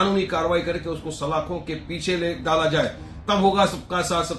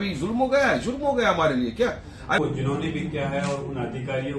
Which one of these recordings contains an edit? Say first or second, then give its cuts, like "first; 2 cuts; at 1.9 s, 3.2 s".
second; 1 cut; at 2.4 s